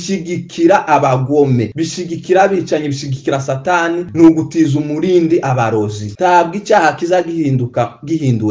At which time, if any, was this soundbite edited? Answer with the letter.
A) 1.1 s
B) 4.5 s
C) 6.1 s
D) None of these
C